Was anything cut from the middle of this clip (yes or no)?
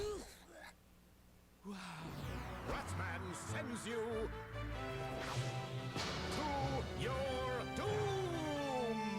no